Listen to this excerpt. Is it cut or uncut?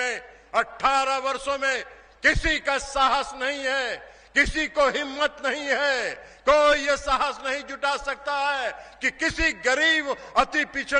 uncut